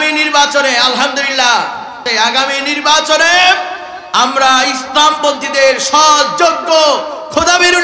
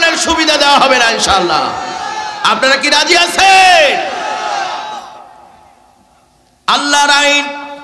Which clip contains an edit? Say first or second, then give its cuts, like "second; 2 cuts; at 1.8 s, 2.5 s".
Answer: first; 1 cut; at 2.0 s